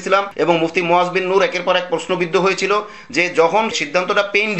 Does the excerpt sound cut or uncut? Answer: uncut